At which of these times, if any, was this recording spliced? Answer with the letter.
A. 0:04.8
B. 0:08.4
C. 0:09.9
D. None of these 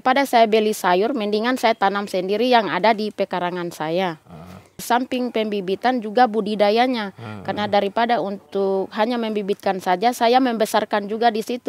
A